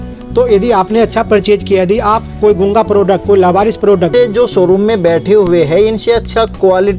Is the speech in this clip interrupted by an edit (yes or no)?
yes